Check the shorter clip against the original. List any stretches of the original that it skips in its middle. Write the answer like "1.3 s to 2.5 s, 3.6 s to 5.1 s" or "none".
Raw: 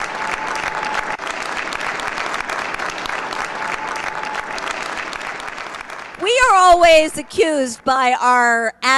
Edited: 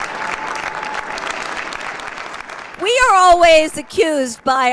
2.3 s to 5.7 s